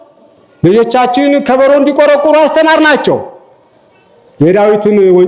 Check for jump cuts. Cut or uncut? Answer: uncut